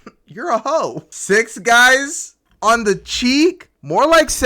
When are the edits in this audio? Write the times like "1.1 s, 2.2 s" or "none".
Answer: 1.1 s